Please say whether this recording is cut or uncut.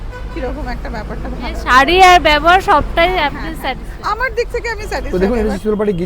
cut